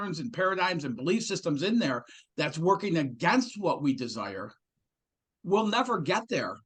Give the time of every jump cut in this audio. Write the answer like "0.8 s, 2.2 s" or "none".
none